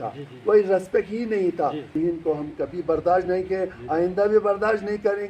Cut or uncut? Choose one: cut